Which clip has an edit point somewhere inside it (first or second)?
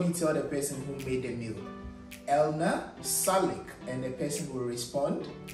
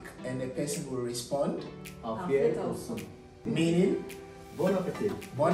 second